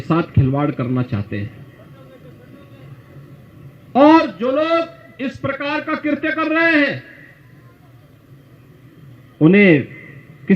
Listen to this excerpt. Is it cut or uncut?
uncut